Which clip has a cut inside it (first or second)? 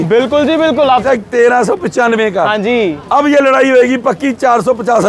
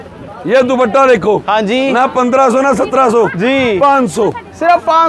first